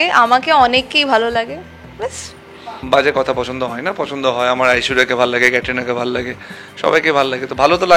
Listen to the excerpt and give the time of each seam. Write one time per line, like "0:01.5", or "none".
0:02.8